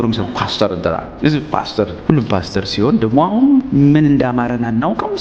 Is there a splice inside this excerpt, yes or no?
yes